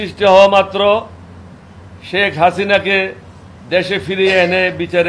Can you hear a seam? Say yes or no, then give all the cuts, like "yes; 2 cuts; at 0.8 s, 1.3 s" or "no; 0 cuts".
no; 0 cuts